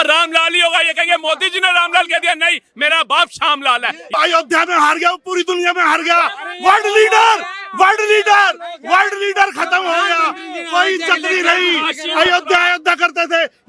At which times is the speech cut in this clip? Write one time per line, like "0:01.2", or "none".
0:04.1